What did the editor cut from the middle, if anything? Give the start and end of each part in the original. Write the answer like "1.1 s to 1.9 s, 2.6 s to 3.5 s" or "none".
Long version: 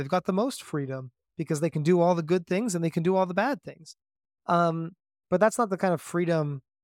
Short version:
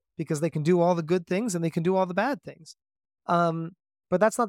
none